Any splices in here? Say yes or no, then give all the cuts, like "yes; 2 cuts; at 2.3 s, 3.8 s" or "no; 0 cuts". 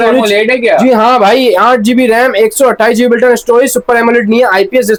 no; 0 cuts